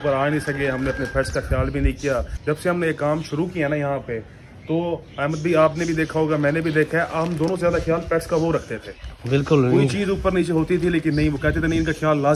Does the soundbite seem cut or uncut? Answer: cut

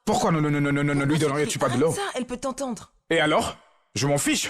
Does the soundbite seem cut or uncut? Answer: uncut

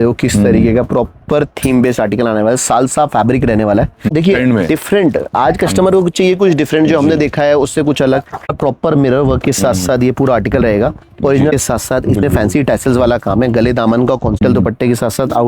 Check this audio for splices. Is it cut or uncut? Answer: cut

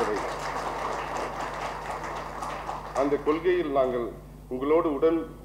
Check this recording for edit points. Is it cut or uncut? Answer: uncut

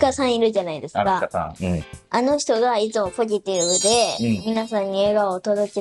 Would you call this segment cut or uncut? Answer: uncut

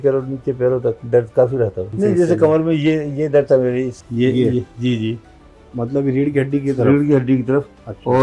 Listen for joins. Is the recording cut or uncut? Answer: cut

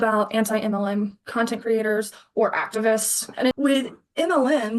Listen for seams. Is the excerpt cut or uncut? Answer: cut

